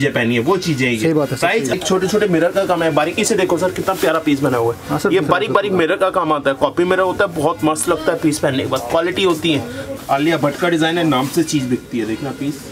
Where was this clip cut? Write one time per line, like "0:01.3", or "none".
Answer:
0:01.7
0:10.0